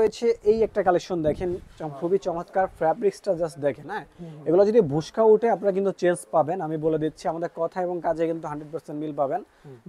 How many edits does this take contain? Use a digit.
0